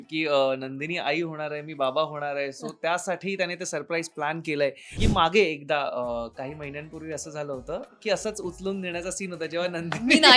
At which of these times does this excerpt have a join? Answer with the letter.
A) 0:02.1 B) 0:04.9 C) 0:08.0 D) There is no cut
B